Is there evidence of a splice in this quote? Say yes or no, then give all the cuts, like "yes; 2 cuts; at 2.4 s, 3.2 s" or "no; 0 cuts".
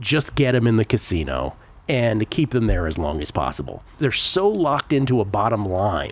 yes; 1 cut; at 3.9 s